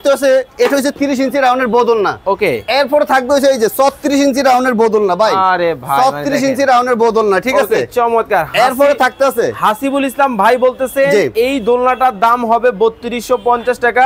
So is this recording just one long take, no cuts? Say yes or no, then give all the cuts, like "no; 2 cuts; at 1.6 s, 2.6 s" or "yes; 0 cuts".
yes; 0 cuts